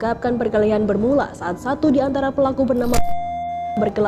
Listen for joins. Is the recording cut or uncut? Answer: uncut